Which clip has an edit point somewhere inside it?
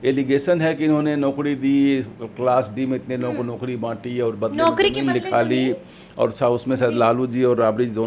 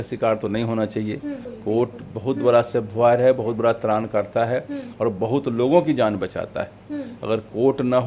second; 1 cut; at 1.5 s

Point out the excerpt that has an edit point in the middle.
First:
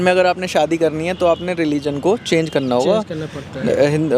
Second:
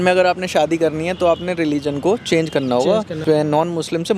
second; 1 cut; at 3.2 s

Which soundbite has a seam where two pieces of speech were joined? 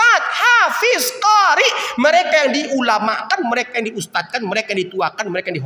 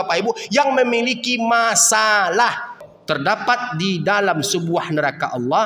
second; 1 cut; at 2.8 s

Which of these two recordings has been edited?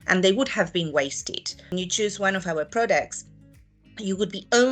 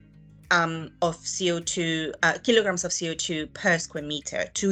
first; 1 cut; at 1.6 s

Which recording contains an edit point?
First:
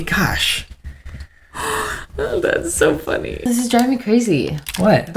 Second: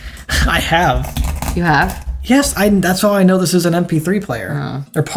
first; 1 cut; at 3.5 s

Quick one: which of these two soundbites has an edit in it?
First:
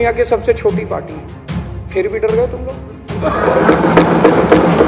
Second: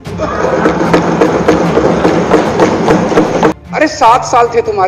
second; 1 cut; at 3.5 s

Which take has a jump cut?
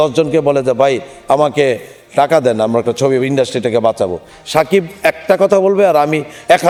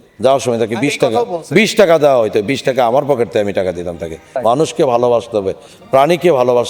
second; 1 cut; at 4.4 s

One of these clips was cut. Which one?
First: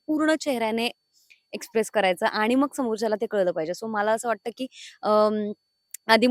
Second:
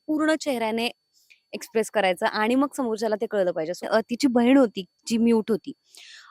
second; 1 cut; at 3.9 s

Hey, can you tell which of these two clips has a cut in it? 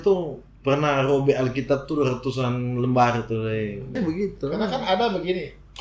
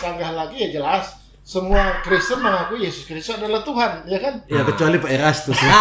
first; 1 cut; at 4.0 s

